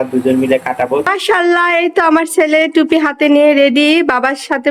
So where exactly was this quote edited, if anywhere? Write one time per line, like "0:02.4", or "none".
0:01.1